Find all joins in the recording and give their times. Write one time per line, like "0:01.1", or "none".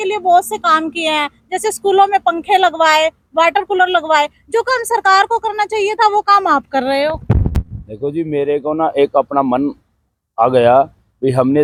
none